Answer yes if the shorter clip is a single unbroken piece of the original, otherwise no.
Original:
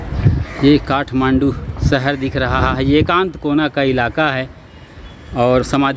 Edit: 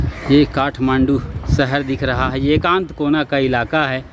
no